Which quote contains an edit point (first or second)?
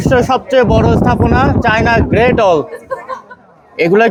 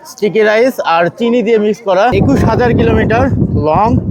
second